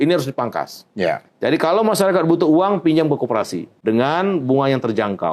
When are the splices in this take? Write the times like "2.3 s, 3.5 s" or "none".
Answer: 3.6 s